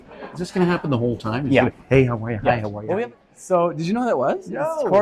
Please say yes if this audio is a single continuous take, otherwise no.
no